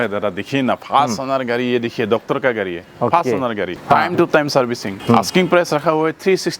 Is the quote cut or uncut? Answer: cut